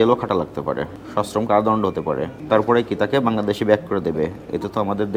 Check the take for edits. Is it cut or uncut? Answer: cut